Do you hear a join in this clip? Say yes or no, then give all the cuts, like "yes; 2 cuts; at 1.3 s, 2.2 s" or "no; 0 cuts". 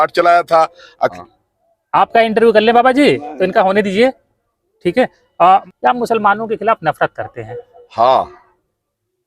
yes; 2 cuts; at 1.2 s, 5.6 s